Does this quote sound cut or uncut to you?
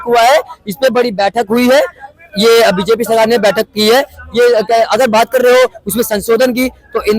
cut